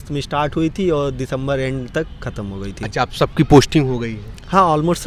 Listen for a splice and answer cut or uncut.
uncut